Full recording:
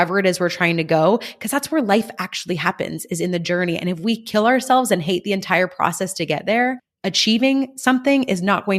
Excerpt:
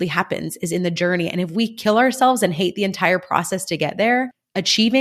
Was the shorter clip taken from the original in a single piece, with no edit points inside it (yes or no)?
yes